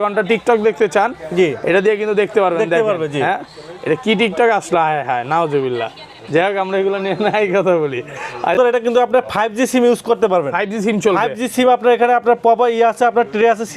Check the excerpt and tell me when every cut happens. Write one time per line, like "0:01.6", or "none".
0:08.6